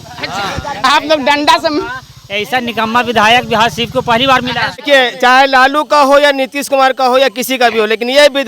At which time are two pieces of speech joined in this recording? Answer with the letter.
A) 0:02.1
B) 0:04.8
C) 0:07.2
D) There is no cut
B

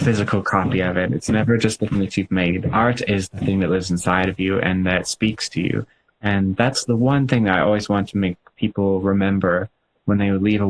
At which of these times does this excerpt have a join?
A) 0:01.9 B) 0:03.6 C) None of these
A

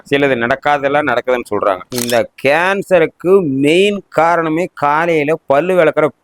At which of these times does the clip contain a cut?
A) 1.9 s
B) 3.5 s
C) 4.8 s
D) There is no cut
A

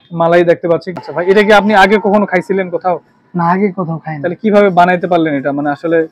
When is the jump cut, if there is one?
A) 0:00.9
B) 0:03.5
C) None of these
A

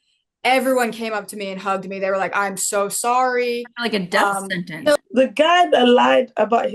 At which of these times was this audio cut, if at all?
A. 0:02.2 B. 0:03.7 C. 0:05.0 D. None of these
C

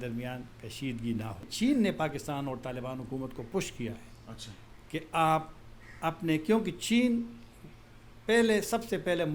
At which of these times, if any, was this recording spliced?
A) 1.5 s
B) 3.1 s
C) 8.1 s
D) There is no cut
A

